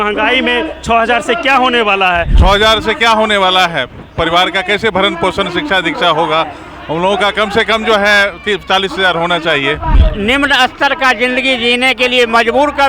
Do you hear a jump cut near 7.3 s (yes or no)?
no